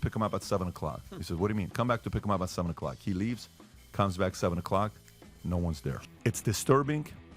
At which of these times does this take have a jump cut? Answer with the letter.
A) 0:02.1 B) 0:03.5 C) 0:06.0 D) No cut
C